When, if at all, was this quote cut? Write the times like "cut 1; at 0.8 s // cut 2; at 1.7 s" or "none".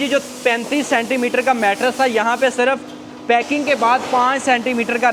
none